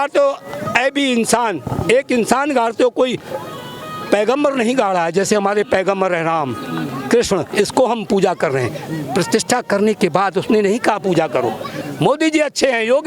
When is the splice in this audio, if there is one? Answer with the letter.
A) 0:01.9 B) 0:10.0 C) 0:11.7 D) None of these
C